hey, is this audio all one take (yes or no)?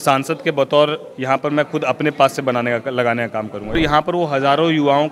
no